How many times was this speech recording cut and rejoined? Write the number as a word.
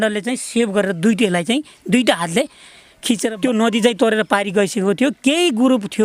one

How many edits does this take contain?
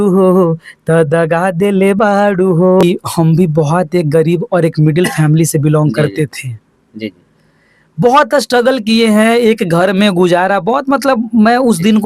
one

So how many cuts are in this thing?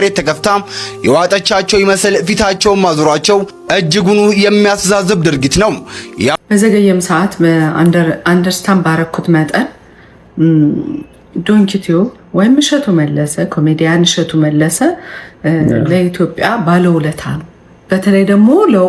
one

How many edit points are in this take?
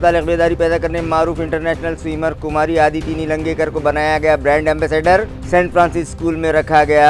zero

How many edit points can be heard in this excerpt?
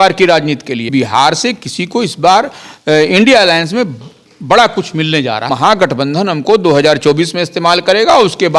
two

